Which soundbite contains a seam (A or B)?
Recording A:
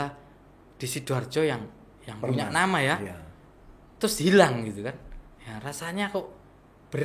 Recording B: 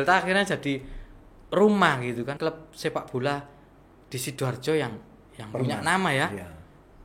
B